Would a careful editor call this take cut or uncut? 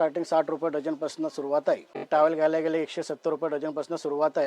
cut